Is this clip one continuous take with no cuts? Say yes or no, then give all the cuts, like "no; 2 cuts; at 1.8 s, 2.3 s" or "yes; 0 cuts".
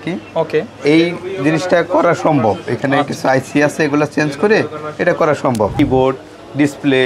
no; 1 cut; at 5.7 s